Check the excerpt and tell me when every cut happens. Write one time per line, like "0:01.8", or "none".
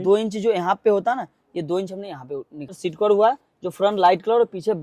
0:02.8